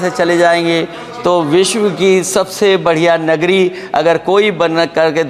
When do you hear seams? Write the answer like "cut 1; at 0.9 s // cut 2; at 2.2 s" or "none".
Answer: none